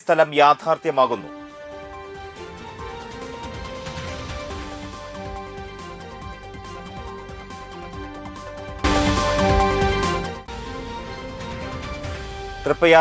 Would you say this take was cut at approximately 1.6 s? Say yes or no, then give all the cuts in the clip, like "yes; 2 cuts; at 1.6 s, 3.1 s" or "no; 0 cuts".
no; 0 cuts